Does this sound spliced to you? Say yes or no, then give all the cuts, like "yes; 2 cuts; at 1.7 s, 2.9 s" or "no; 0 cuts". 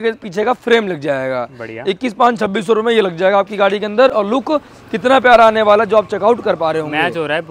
no; 0 cuts